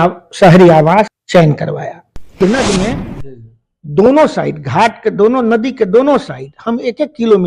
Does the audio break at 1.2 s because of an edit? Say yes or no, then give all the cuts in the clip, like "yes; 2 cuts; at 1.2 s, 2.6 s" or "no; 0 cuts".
yes; 2 cuts; at 1.2 s, 2.4 s